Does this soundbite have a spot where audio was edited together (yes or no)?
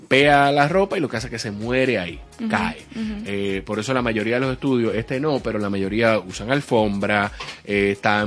no